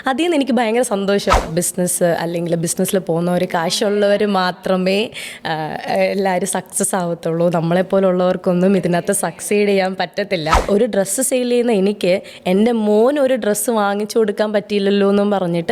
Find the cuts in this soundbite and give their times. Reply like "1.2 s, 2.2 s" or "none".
1.4 s, 10.6 s